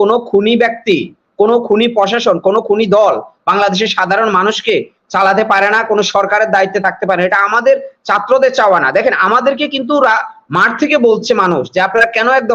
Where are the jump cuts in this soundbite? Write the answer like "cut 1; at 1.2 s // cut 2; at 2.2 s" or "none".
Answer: none